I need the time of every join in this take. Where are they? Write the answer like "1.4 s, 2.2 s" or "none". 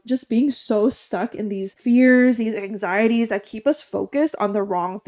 none